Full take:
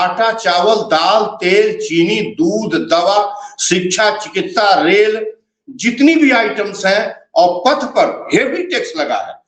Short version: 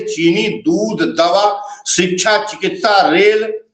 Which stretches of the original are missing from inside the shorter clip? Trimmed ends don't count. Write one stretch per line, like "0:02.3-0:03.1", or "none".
none